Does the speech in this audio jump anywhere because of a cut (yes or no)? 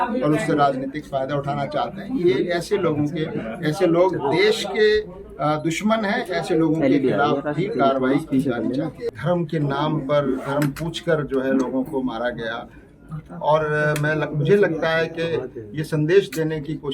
yes